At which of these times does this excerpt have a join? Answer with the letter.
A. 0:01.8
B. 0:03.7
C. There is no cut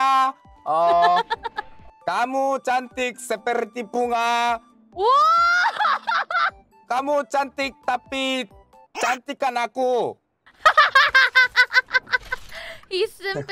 A